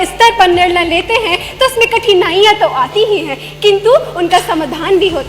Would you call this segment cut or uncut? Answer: uncut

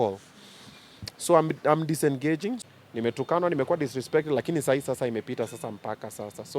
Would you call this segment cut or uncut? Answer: cut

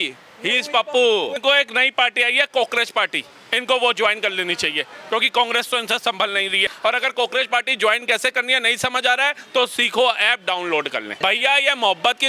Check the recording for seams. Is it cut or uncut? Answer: cut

